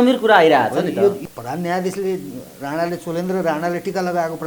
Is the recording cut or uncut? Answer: cut